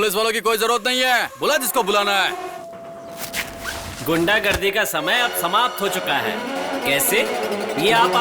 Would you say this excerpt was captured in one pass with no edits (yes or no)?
no